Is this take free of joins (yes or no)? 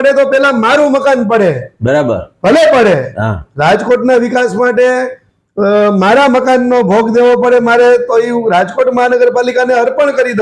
yes